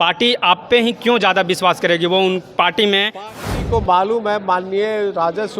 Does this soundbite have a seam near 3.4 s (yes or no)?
yes